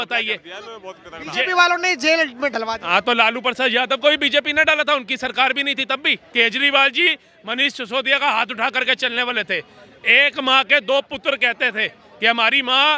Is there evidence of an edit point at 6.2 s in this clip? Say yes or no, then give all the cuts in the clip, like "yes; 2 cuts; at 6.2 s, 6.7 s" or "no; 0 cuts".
yes; 1 cut; at 6.2 s